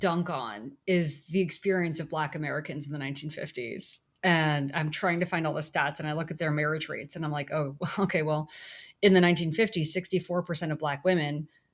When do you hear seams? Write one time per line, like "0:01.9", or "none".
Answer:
none